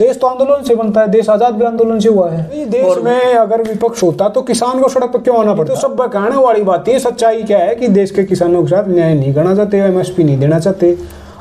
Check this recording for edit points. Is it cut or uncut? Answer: cut